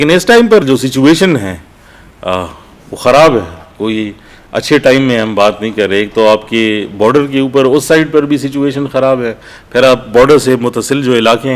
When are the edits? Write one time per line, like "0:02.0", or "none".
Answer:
none